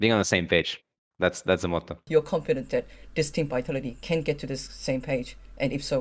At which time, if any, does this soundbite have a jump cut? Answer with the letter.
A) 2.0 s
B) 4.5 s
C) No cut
A